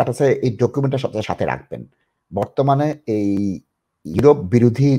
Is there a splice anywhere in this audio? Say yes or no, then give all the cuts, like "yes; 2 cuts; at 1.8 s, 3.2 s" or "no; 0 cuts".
no; 0 cuts